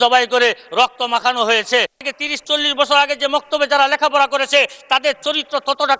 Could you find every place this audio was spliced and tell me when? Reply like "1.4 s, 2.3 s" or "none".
1.9 s